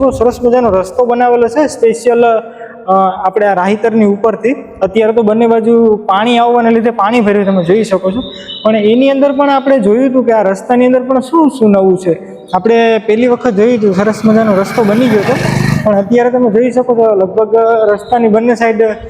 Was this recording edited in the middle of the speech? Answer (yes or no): no